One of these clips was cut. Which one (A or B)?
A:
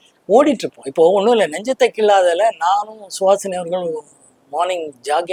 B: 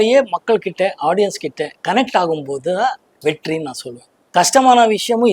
B